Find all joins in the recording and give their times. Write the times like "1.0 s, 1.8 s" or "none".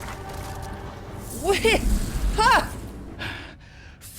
3.2 s